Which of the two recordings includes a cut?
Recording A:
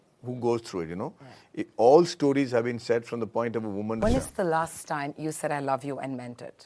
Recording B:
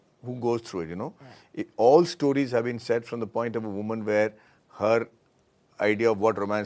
A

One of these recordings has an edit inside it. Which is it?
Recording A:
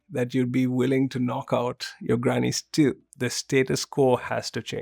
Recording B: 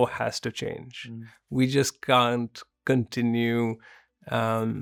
A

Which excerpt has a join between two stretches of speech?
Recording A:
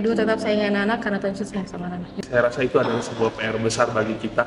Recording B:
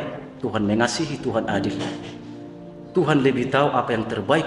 A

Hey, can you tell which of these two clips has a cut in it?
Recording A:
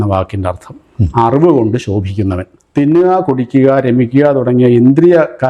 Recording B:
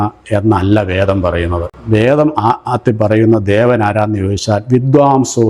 A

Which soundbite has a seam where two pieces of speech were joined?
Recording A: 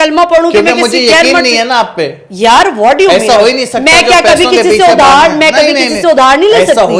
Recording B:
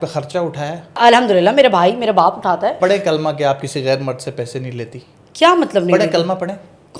B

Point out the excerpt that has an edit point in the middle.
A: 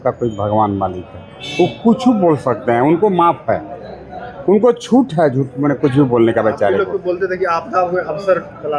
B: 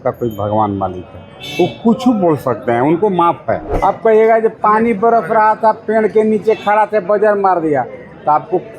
B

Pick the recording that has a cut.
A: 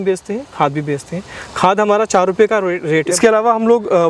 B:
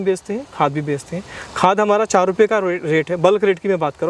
A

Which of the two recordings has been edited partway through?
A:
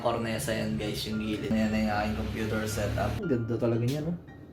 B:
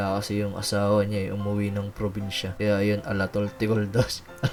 A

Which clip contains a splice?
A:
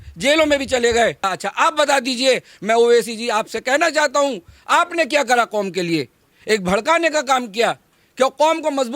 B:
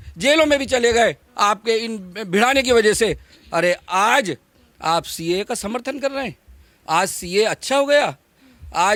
A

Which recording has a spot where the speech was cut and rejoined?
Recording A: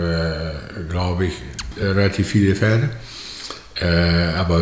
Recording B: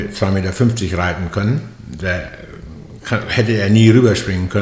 A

